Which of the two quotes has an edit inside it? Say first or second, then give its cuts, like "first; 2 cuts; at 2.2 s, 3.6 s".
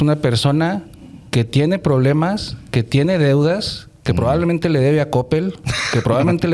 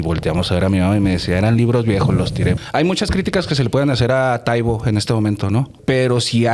second; 2 cuts; at 2.6 s, 5.7 s